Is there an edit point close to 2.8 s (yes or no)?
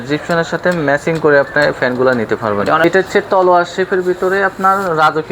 yes